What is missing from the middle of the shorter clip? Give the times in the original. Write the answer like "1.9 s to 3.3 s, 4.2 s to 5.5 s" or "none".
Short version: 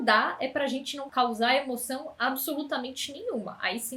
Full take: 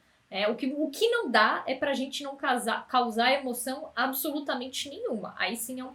2.3 s to 2.8 s